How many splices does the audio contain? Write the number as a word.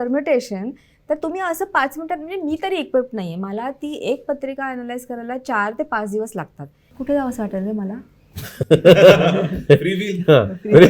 one